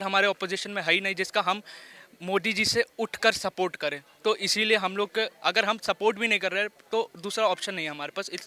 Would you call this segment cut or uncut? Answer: uncut